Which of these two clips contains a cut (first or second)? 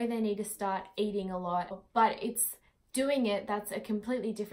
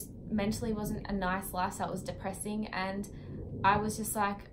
first